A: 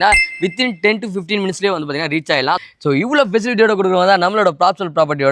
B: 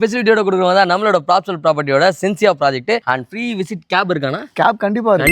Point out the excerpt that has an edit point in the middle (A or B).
B